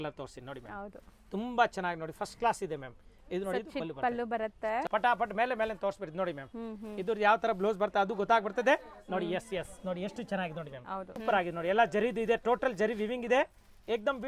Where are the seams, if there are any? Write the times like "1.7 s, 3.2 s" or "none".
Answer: 4.9 s, 11.2 s